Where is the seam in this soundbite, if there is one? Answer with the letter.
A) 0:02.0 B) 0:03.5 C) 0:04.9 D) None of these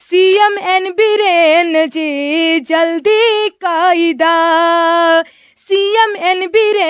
D